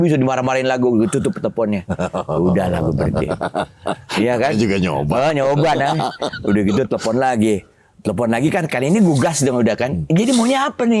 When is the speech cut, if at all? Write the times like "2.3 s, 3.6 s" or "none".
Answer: none

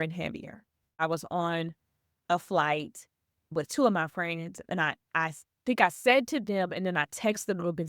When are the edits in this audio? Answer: 1.0 s, 3.5 s

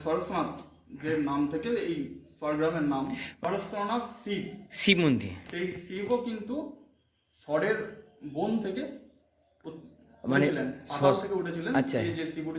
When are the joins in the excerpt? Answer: 3.4 s

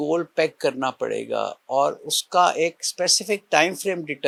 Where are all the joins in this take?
none

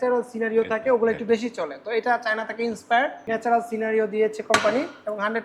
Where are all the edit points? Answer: 3.2 s

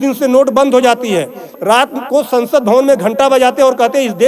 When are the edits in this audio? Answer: 1.5 s

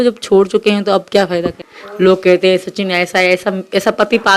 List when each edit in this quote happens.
1.6 s

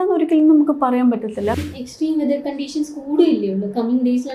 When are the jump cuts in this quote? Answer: 1.6 s

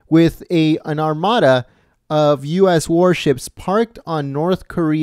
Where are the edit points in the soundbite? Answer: 1.1 s

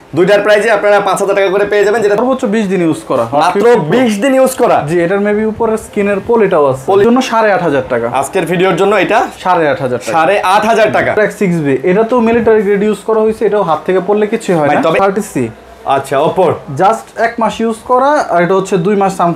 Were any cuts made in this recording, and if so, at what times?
2.2 s, 7.0 s, 11.2 s, 15.0 s

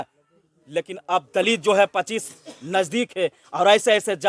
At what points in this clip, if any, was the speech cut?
none

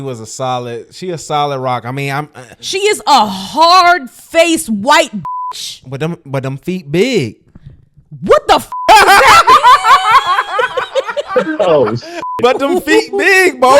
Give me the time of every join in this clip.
none

